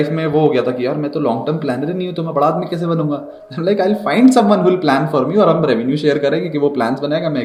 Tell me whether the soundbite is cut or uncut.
uncut